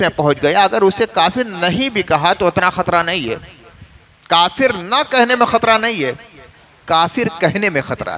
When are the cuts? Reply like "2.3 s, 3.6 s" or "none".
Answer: none